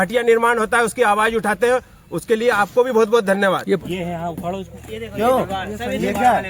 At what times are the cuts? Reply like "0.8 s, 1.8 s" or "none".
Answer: 3.8 s